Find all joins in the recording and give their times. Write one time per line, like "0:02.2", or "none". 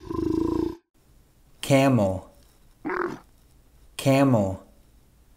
0:00.9